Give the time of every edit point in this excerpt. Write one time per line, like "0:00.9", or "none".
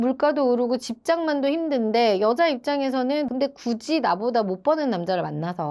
0:03.3